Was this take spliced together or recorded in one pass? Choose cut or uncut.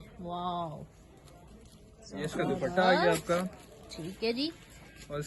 uncut